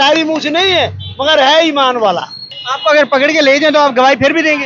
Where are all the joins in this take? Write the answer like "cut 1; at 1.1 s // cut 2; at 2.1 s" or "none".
cut 1; at 2.6 s